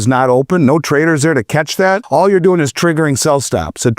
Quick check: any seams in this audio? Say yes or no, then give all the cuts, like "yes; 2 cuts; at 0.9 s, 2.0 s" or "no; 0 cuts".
yes; 1 cut; at 2.0 s